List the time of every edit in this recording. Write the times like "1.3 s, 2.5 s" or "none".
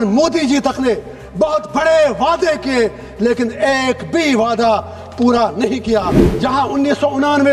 6.2 s